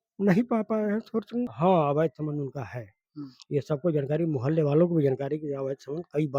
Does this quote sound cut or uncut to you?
cut